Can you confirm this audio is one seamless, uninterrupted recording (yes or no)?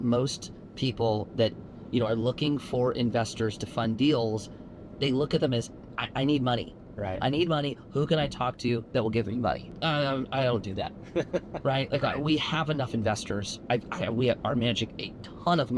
yes